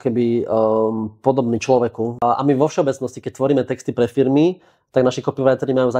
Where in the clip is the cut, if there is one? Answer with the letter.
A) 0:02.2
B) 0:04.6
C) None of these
A